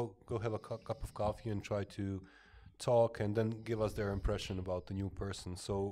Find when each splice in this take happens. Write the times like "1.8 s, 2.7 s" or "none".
none